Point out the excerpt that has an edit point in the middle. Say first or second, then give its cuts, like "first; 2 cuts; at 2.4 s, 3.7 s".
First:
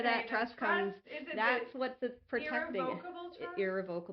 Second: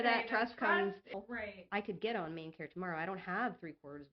second; 1 cut; at 1.1 s